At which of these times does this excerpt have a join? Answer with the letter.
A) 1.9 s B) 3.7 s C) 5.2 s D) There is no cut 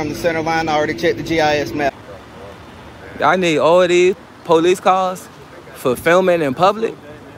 A